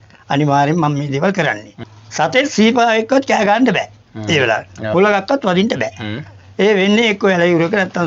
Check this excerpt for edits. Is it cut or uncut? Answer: uncut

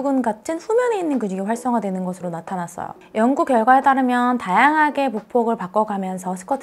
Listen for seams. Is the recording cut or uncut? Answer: cut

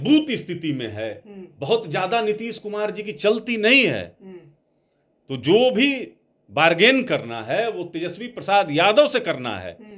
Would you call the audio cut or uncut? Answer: uncut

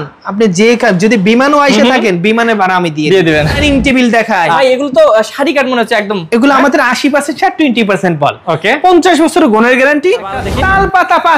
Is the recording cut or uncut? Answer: cut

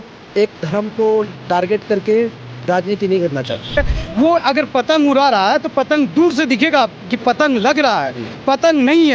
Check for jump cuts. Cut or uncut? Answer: cut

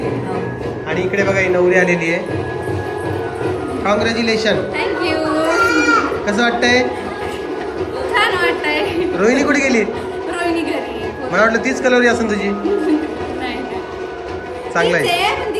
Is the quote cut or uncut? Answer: uncut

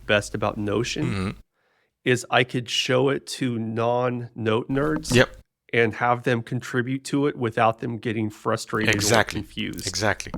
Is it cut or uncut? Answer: uncut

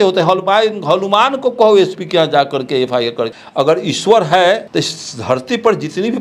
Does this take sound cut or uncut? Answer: cut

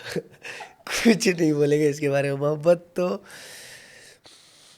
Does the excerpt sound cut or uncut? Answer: uncut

